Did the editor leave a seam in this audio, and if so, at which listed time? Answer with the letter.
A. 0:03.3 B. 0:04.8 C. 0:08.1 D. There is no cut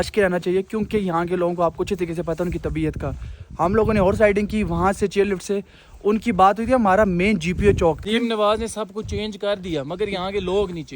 C